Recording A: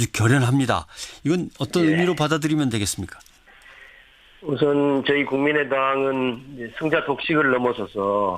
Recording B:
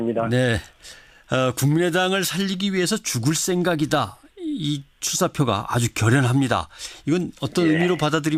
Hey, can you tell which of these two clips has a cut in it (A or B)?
A